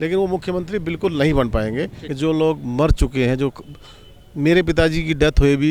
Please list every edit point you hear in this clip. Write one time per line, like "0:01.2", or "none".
0:02.0